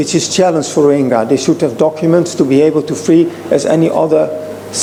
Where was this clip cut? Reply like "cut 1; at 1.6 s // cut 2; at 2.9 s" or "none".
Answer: none